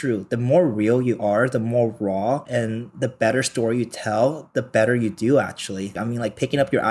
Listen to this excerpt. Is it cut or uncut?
cut